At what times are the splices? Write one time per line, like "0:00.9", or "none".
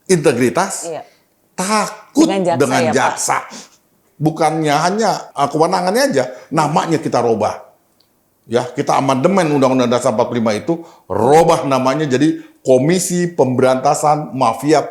0:04.0
0:05.3